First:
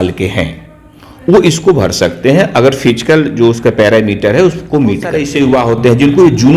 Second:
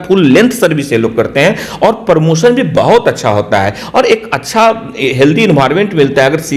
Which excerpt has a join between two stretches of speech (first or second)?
first